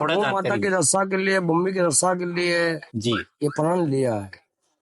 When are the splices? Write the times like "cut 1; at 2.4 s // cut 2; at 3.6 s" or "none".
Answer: none